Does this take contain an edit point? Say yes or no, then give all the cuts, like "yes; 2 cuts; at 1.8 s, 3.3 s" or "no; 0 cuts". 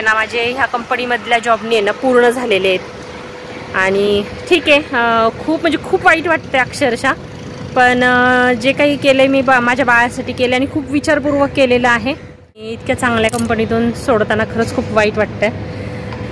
yes; 1 cut; at 12.7 s